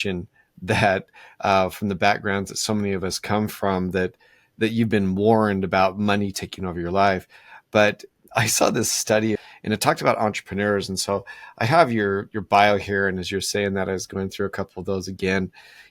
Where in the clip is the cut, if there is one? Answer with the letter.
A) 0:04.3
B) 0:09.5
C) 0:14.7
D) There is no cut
B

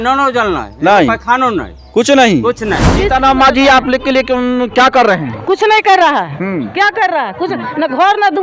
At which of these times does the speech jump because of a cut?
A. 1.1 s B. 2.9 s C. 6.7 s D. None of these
B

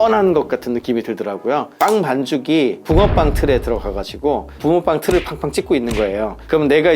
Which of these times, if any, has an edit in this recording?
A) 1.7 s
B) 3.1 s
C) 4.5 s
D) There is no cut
A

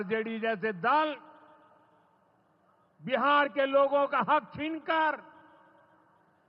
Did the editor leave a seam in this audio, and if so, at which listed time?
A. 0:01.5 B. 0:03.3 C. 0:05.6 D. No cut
D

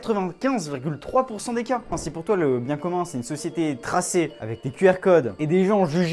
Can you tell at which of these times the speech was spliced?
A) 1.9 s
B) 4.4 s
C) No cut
A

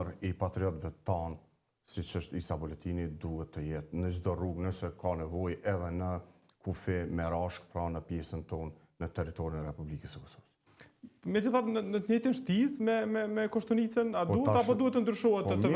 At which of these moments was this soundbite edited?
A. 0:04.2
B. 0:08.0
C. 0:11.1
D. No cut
D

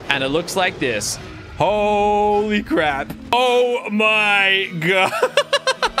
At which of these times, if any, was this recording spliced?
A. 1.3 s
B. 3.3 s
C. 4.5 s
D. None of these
B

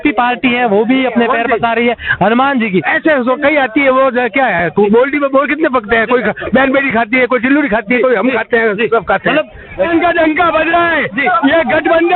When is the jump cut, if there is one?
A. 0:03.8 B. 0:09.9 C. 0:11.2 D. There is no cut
B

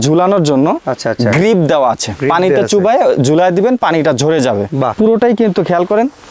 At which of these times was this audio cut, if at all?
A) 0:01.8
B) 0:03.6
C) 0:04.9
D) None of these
C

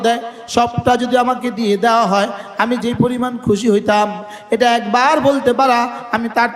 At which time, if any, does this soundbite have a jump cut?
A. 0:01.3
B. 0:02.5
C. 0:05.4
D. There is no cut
D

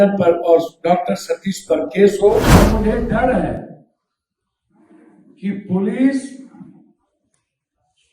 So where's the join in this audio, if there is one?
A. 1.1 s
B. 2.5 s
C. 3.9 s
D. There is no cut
B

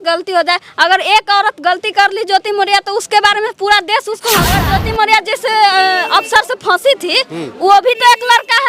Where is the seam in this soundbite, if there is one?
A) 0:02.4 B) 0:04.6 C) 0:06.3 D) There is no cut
B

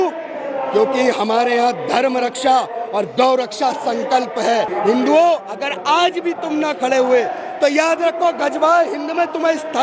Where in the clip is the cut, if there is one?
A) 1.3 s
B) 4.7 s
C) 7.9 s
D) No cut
B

